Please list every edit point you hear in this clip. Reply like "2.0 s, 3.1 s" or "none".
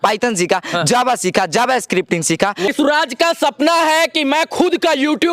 2.7 s